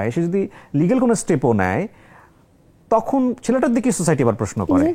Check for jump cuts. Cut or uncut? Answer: uncut